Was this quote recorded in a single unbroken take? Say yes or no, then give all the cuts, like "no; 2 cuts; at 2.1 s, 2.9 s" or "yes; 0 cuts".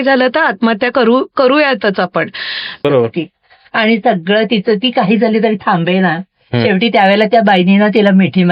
no; 1 cut; at 2.8 s